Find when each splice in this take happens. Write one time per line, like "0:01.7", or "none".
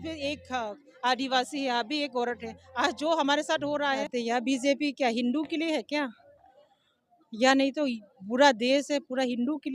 0:04.1